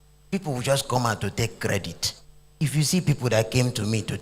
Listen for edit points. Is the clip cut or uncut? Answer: cut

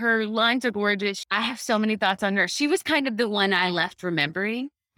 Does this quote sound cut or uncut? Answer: uncut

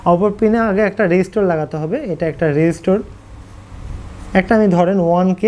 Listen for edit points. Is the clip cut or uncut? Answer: uncut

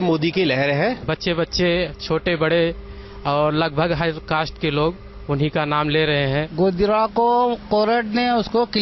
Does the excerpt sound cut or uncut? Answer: cut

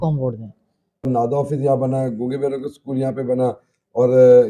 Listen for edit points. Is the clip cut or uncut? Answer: cut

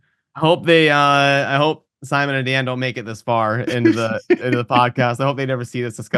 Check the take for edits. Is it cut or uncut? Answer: uncut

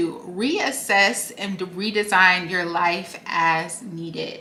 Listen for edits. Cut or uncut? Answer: uncut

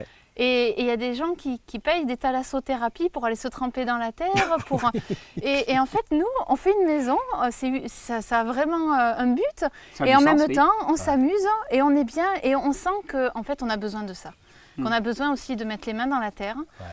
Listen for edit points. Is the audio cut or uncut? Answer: uncut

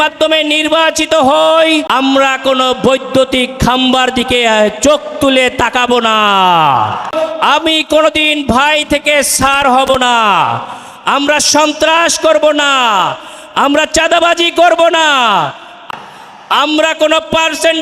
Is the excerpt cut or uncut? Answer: cut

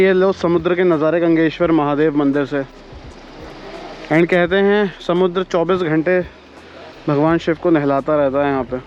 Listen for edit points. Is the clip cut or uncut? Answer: uncut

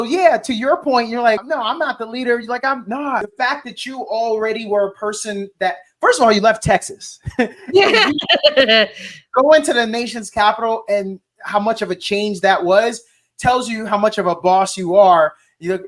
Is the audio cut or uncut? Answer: cut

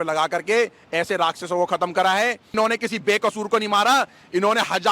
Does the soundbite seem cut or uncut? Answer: cut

